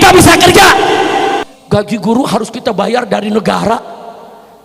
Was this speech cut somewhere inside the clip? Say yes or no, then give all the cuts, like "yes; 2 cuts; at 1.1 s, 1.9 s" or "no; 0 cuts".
yes; 1 cut; at 1.4 s